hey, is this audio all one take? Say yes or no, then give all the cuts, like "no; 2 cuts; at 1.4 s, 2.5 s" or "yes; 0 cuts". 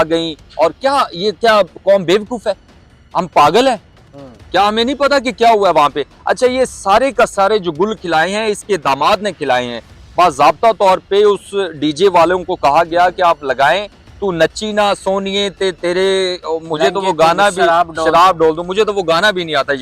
yes; 0 cuts